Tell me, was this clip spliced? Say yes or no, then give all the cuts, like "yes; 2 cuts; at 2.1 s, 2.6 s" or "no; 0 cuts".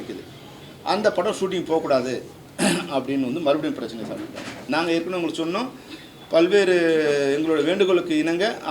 no; 0 cuts